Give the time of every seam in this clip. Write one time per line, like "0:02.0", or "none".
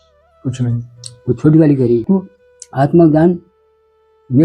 0:02.0